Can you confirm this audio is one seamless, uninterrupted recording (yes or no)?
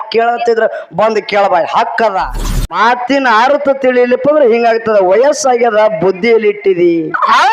no